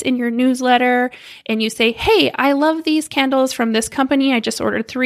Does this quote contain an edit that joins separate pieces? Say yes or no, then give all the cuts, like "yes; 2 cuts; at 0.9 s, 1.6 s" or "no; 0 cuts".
no; 0 cuts